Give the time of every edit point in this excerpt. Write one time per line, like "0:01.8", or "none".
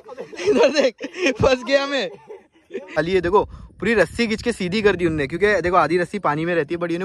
0:03.0